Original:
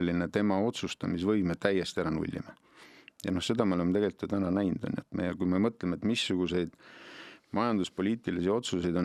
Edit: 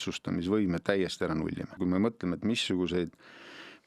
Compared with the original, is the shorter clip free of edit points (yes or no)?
no